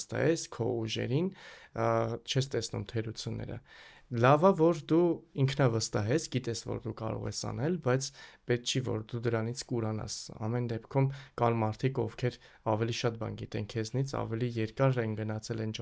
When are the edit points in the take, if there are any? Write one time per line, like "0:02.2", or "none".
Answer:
none